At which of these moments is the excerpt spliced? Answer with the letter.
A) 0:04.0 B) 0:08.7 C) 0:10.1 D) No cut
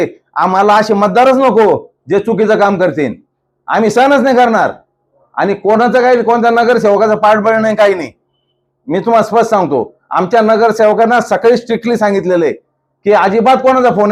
D